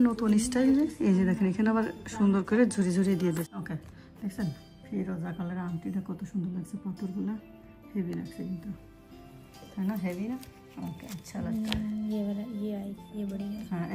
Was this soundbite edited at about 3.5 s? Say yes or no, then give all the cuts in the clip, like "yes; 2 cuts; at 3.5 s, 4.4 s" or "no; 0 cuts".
yes; 1 cut; at 3.5 s